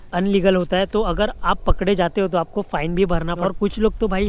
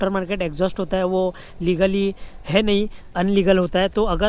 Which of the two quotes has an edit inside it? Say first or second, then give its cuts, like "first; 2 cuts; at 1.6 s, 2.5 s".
first; 1 cut; at 3.4 s